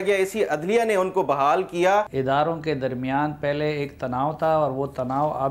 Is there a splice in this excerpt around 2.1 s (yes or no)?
yes